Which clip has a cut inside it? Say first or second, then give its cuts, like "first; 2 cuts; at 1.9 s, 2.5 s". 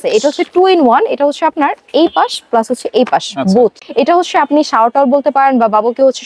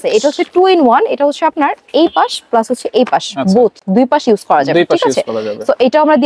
first; 1 cut; at 3.8 s